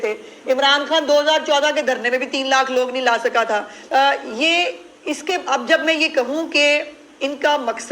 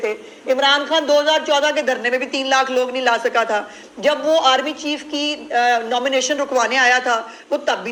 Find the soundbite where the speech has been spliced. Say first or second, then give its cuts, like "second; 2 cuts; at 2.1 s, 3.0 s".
first; 1 cut; at 3.8 s